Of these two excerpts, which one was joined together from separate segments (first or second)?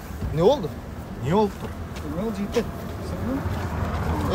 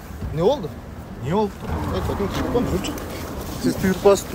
second